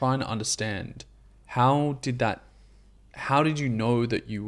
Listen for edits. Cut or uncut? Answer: uncut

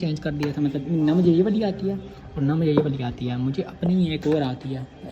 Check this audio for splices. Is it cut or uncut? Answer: uncut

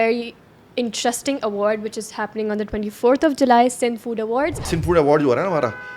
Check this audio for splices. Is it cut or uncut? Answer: cut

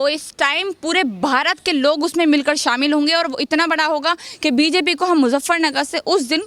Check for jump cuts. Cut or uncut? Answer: uncut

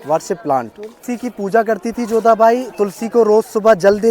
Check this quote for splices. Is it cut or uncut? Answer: cut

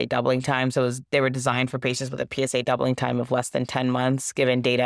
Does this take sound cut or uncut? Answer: uncut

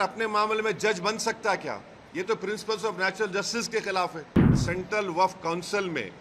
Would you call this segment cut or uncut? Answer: cut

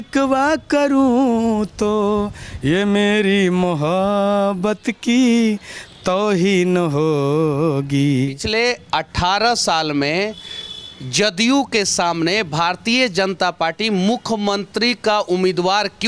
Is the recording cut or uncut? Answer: cut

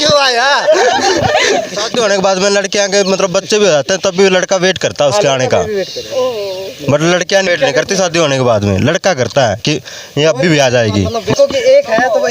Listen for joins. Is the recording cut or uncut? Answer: cut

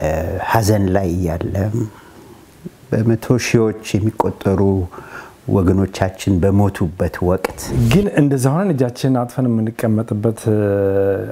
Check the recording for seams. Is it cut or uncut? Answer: cut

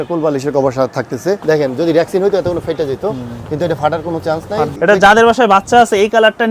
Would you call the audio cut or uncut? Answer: cut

